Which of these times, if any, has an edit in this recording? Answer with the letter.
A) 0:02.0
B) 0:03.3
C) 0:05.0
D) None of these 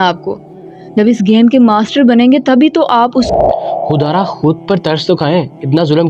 B